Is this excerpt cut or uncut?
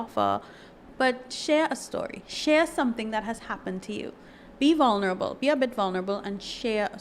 cut